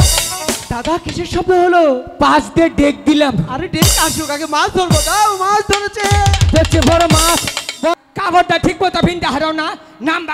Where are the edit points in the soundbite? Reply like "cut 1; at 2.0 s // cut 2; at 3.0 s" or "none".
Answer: cut 1; at 7.9 s